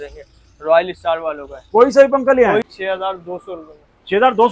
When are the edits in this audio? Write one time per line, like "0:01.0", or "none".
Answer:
0:02.7